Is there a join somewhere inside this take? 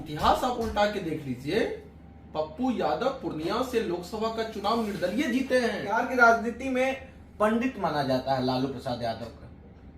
yes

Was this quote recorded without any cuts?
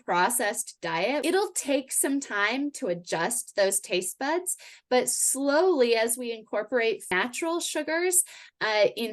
no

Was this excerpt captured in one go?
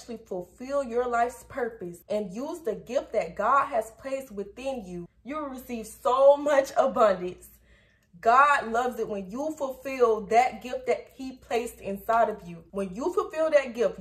yes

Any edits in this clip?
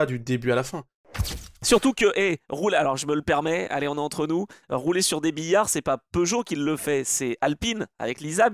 yes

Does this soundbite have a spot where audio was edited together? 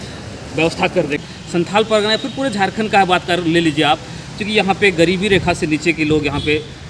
yes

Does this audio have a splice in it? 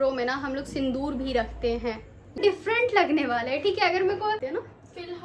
yes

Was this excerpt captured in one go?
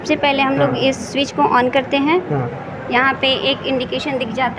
yes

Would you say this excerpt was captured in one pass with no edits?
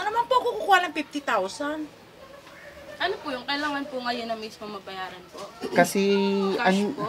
yes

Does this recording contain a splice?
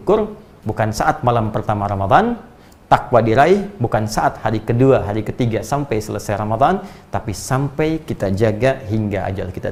no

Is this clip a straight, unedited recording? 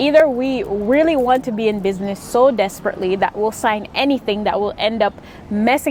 yes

